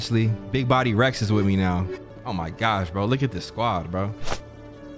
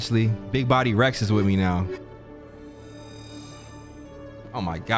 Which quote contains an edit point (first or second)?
first